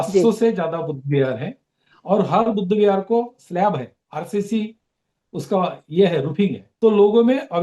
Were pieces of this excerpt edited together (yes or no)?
yes